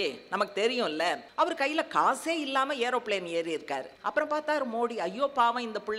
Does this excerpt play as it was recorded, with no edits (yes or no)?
no